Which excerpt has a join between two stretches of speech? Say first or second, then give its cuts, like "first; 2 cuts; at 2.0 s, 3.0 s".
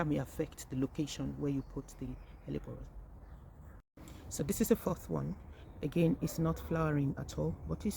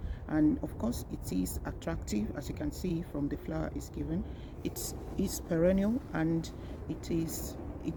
first; 1 cut; at 3.9 s